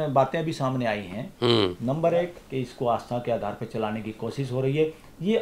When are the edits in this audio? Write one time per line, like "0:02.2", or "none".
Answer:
0:02.4